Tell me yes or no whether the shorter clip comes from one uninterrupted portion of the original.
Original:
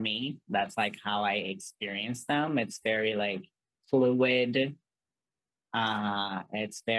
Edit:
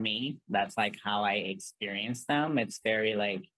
yes